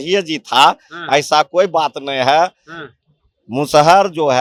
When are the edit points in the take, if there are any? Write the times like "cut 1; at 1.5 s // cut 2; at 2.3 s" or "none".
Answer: none